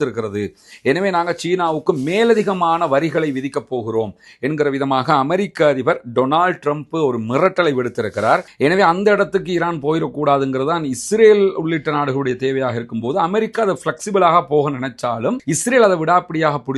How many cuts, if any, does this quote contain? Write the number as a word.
one